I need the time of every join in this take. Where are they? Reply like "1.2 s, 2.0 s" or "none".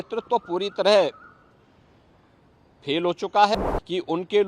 3.5 s